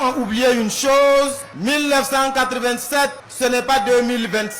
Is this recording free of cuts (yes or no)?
no